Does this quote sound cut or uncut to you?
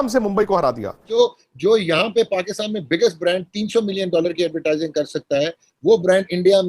cut